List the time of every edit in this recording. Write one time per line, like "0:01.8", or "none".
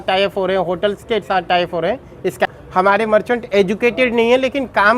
0:02.5